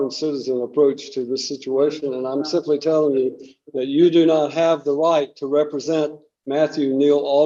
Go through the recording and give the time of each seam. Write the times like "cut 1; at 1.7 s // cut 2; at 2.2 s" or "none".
none